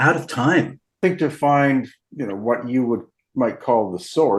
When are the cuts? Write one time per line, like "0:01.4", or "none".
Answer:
0:01.0
0:02.0